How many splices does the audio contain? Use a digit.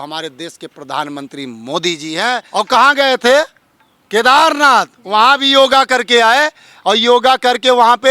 1